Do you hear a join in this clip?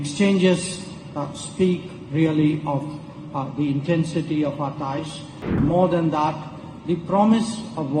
yes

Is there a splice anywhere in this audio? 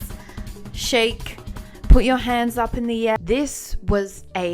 yes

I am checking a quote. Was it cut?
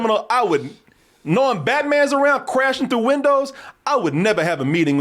no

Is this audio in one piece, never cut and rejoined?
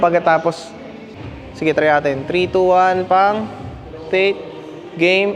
no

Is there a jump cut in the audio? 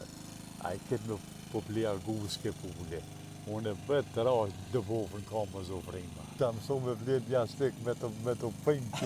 yes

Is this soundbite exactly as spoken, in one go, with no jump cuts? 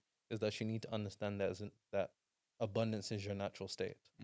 yes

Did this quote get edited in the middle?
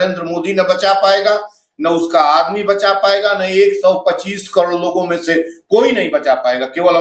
no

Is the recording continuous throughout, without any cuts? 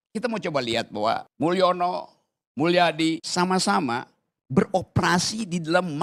no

